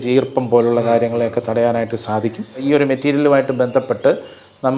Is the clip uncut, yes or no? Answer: no